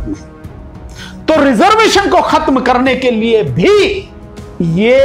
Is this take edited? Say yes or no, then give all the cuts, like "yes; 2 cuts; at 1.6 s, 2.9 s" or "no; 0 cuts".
no; 0 cuts